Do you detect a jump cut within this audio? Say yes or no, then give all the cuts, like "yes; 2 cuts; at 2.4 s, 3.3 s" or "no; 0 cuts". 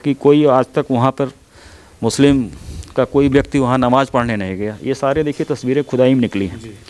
no; 0 cuts